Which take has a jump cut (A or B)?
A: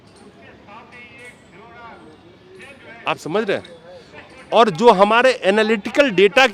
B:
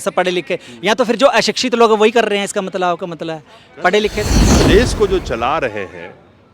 B